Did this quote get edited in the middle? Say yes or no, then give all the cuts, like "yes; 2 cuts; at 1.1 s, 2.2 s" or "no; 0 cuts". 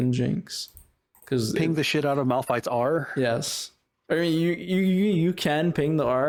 no; 0 cuts